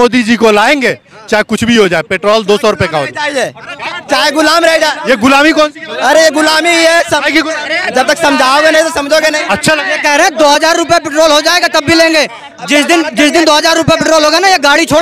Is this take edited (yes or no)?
no